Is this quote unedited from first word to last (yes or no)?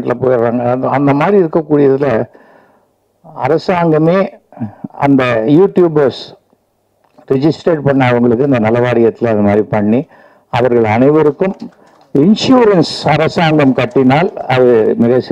yes